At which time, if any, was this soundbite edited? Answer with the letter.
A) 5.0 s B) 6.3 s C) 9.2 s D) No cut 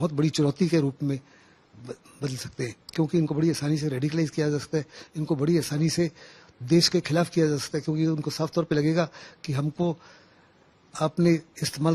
D